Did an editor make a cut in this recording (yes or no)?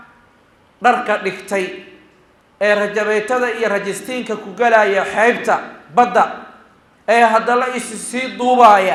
no